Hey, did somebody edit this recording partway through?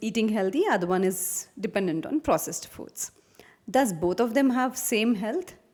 no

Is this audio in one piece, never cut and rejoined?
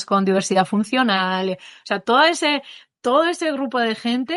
yes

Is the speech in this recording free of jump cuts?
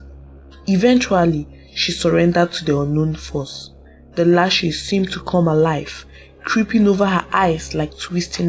yes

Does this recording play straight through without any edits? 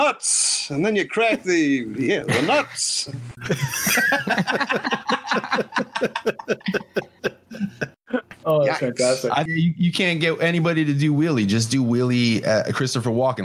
no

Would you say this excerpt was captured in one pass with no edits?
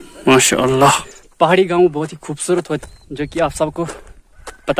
no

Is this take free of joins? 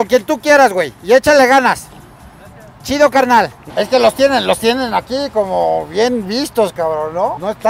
yes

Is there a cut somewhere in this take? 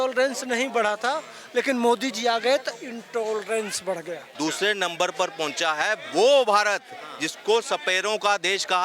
yes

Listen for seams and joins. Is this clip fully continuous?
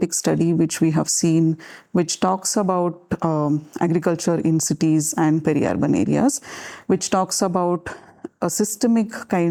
yes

